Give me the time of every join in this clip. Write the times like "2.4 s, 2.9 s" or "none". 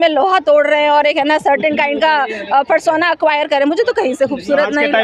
none

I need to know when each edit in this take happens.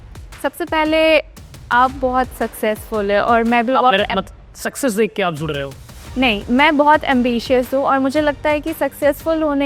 none

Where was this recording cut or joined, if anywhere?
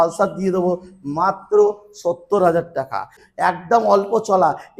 3.2 s

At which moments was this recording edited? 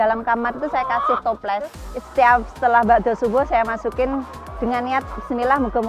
4.4 s

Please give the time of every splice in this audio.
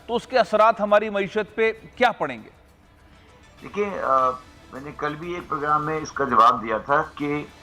none

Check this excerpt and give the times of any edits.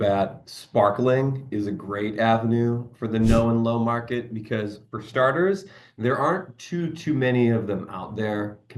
none

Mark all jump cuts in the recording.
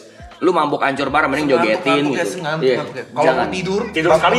none

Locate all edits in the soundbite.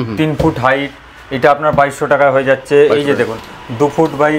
none

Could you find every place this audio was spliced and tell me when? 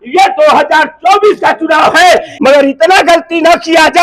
2.3 s

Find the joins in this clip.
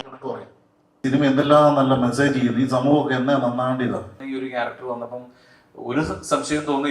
1.0 s, 4.2 s

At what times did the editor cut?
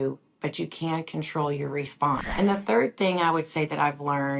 none

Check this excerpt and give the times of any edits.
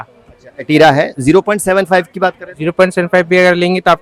none

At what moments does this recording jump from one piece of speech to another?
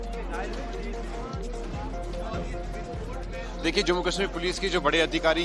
2.4 s

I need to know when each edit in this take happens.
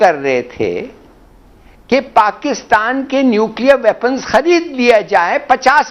none

